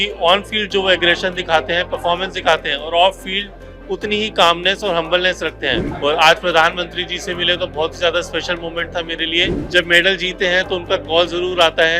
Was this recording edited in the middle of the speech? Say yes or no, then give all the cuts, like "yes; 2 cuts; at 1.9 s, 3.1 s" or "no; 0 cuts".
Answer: yes; 2 cuts; at 5.9 s, 9.6 s